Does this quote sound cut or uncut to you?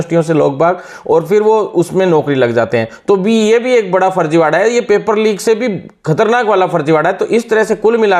uncut